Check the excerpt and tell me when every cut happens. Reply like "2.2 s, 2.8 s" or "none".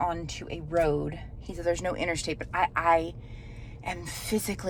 none

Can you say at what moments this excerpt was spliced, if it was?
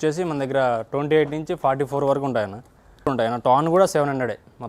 3.1 s

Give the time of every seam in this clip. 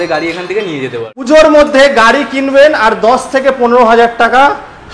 1.2 s

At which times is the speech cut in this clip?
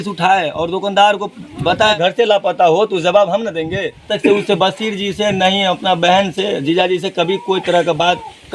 1.9 s, 4.1 s

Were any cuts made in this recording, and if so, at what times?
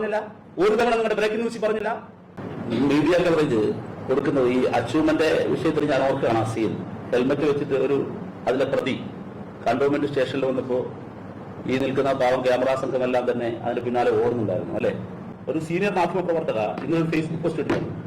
1.8 s, 14.8 s

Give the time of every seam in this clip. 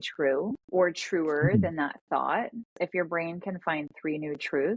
2.7 s

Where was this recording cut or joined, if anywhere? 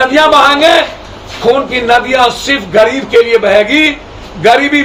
none

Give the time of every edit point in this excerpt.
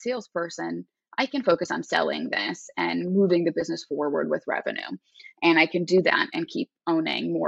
none

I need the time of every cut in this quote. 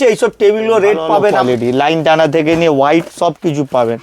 1.4 s

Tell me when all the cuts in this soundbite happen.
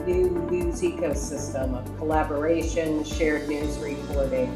none

